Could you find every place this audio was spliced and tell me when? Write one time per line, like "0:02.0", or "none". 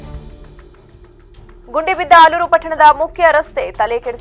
0:01.0